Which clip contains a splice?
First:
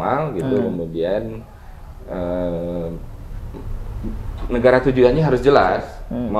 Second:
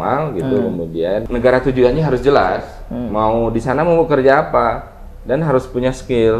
second; 1 cut; at 1.3 s

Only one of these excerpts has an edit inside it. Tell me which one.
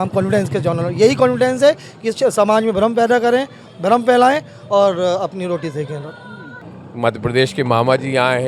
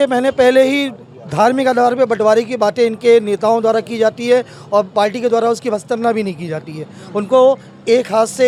first; 1 cut; at 6.4 s

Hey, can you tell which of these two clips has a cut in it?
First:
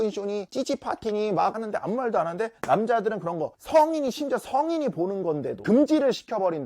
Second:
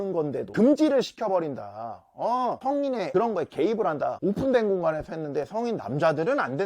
second; 1 cut; at 4.2 s

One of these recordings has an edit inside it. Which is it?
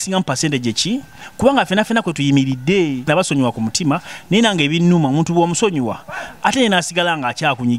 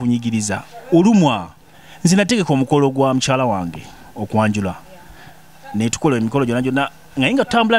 first; 1 cut; at 3.0 s

